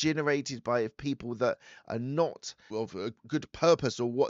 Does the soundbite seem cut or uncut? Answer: cut